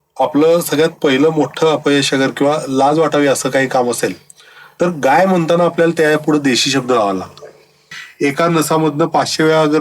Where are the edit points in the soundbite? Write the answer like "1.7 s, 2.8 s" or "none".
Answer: 8.0 s